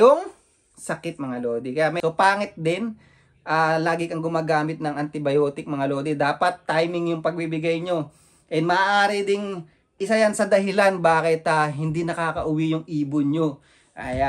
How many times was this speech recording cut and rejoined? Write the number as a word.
one